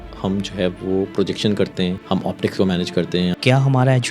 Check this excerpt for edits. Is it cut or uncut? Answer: cut